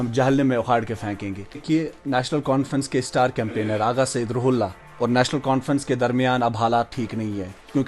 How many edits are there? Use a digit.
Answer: 1